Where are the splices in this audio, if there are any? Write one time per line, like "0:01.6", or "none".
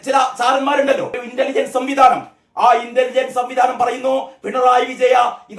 0:01.2